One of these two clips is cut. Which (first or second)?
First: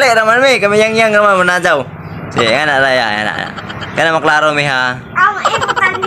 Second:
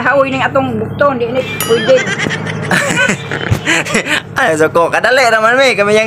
second